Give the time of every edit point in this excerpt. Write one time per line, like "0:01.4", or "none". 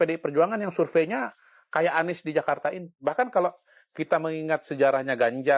0:03.0